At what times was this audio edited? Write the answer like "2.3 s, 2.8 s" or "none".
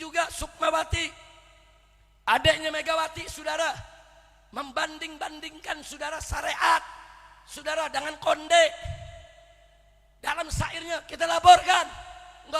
none